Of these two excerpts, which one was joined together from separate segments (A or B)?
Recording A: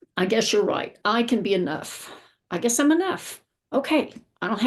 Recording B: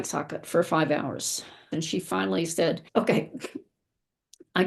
B